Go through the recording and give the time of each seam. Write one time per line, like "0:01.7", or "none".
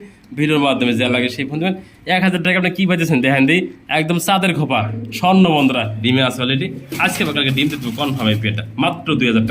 0:06.0